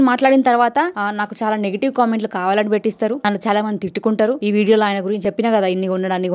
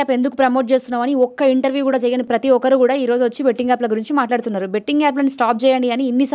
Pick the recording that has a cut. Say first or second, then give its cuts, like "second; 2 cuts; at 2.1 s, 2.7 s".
first; 4 cuts; at 1.0 s, 3.2 s, 4.4 s, 5.2 s